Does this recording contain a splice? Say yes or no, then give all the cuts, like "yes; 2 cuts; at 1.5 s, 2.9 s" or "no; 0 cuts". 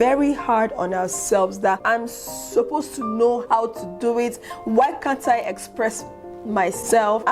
yes; 1 cut; at 1.8 s